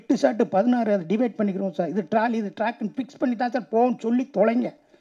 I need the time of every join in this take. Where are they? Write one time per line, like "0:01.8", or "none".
none